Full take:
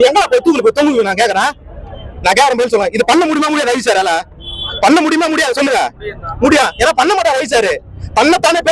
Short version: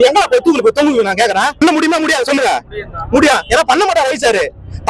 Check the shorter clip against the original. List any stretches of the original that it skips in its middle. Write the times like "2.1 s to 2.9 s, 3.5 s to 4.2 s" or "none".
1.6 s to 4.9 s